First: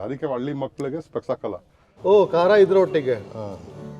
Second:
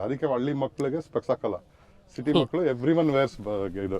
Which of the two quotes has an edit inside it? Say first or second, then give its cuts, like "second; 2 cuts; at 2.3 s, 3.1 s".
first; 1 cut; at 2.0 s